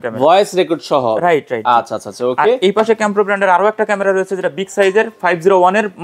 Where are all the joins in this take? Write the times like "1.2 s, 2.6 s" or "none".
none